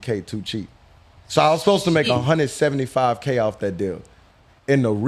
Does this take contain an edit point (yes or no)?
no